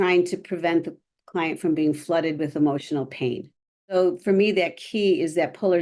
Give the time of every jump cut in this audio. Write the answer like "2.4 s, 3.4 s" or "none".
3.9 s

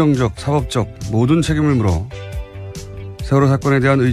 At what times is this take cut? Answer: 1.5 s

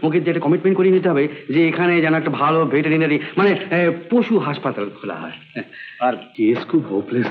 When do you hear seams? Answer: 6.3 s

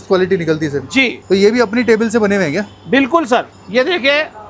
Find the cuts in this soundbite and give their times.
3.5 s

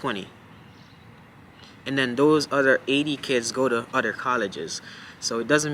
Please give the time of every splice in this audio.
none

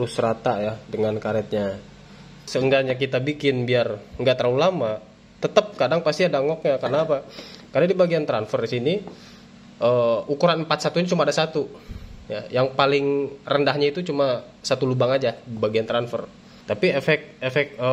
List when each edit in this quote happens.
2.4 s, 16.5 s

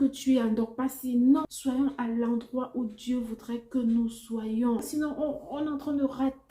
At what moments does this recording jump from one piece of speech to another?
1.4 s, 4.9 s

